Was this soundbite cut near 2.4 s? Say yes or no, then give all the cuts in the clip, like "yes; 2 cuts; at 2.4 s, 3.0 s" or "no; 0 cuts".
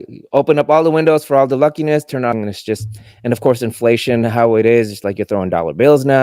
yes; 1 cut; at 2.4 s